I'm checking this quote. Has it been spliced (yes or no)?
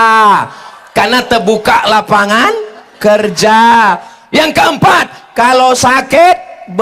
no